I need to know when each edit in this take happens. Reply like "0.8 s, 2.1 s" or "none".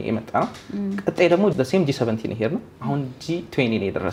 none